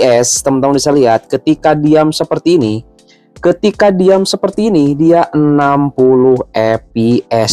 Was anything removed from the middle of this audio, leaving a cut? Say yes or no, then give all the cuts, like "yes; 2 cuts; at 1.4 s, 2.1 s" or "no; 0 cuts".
no; 0 cuts